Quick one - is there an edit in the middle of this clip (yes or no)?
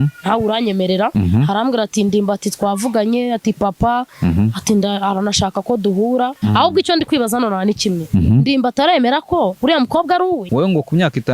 yes